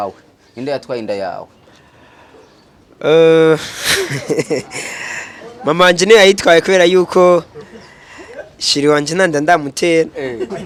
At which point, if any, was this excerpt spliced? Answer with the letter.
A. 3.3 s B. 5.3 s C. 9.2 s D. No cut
D